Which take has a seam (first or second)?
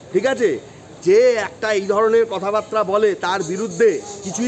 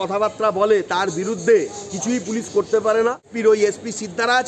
second